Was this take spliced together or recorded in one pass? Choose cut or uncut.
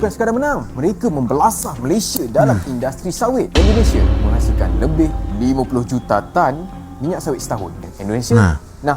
cut